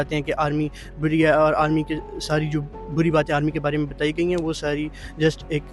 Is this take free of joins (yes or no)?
yes